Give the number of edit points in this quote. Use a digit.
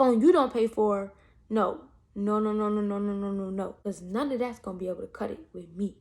1